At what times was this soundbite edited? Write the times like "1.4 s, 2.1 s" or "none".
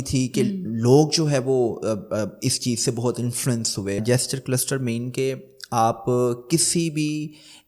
4.0 s